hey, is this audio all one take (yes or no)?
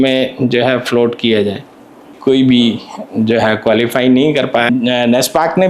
no